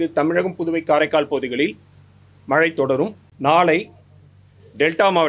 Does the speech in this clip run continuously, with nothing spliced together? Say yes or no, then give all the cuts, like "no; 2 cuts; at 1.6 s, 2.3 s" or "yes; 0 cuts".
no; 1 cut; at 3.2 s